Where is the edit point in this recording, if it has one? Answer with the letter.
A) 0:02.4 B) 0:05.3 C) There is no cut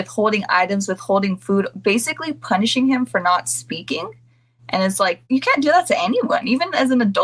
B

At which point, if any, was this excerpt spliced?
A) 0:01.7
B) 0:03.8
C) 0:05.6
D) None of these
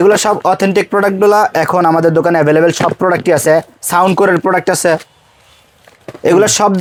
D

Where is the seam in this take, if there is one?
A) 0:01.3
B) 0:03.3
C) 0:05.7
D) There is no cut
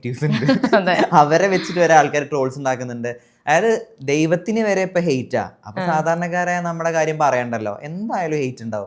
D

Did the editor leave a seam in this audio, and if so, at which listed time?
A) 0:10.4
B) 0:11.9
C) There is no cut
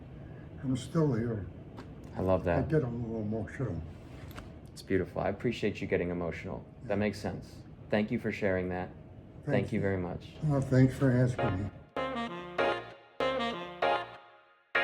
B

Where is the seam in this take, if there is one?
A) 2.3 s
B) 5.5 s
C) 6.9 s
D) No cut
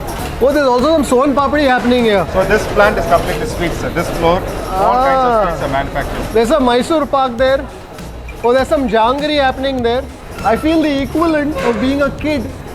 D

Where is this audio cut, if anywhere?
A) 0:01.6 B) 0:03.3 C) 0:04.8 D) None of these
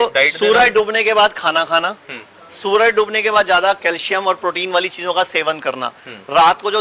D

